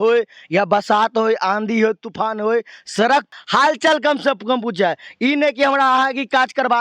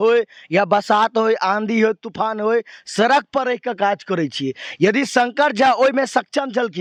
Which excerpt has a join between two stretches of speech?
first; 1 cut; at 3.3 s

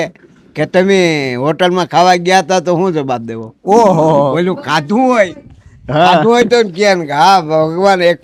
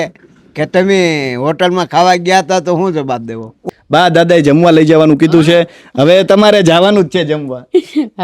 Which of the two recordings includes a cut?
second; 1 cut; at 3.6 s

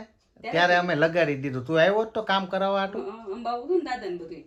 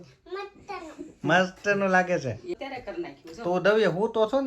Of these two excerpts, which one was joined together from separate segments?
second; 1 cut; at 2.5 s

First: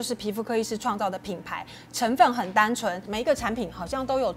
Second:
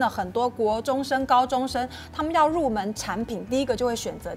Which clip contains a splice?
first; 1 cut; at 3.1 s

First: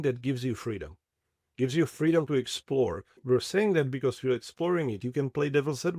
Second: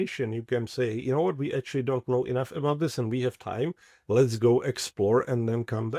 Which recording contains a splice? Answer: first; 1 cut; at 3.1 s

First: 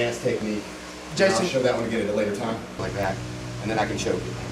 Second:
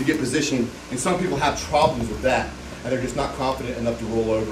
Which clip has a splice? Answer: first; 1 cut; at 2.8 s

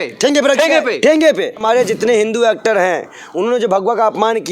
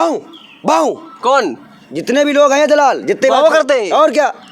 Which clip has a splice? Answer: first; 1 cut; at 1.6 s

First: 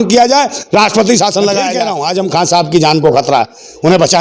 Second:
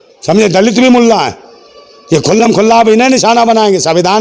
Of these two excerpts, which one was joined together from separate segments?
first; 1 cut; at 1.9 s

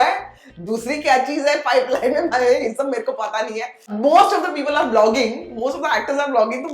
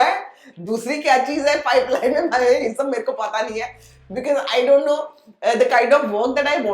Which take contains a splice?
first; 1 cut; at 3.8 s

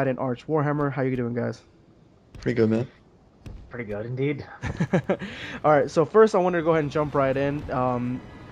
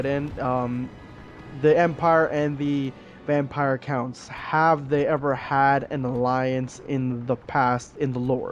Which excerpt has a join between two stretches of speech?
first; 1 cut; at 4.8 s

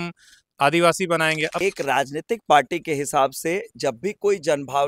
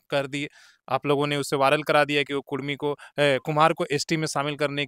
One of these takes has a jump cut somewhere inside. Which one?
first; 1 cut; at 1.6 s

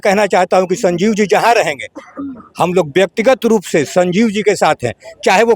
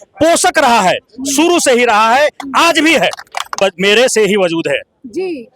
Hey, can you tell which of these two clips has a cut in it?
second; 1 cut; at 3.6 s

